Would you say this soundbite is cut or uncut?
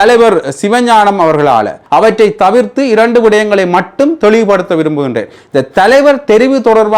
cut